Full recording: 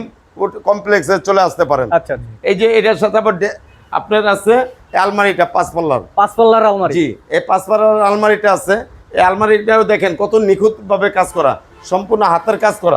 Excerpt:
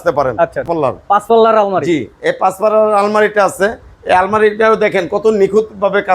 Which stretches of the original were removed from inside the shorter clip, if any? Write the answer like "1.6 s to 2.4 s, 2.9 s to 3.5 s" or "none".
2.4 s to 6.0 s